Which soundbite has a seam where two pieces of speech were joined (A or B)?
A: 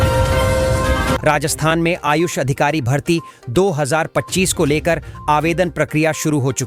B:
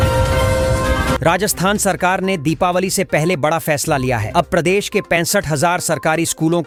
A